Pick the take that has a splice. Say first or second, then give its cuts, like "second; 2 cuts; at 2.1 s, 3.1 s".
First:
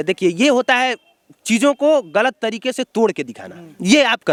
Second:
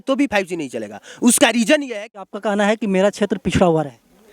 second; 1 cut; at 2.3 s